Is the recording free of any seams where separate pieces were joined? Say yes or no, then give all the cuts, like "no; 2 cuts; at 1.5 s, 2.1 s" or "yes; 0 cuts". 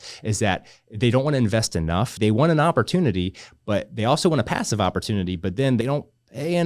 no; 2 cuts; at 2.2 s, 5.8 s